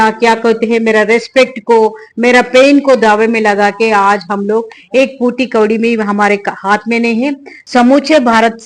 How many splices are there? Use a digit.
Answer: 1